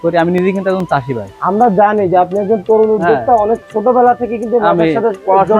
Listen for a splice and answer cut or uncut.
uncut